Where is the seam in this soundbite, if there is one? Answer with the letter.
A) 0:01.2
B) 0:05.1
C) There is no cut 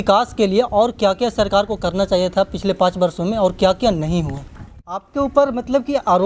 B